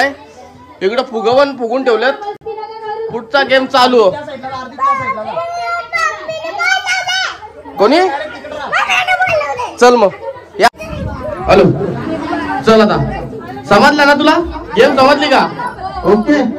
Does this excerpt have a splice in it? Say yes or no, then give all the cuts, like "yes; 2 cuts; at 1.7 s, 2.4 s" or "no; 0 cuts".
no; 0 cuts